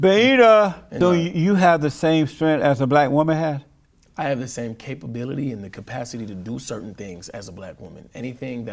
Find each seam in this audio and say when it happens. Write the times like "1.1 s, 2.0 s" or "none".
0.9 s